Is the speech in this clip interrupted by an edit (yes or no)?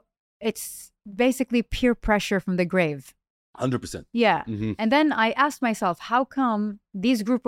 no